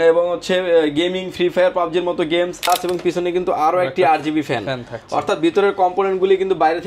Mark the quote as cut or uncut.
cut